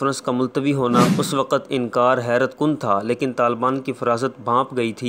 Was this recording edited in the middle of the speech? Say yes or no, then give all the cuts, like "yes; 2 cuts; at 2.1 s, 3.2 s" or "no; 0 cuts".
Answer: yes; 1 cut; at 1.1 s